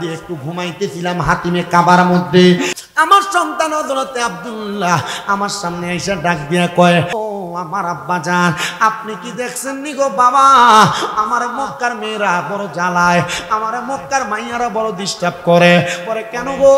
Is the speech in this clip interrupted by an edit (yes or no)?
yes